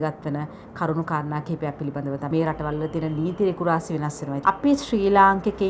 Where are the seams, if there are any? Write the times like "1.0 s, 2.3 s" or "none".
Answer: 2.2 s, 4.4 s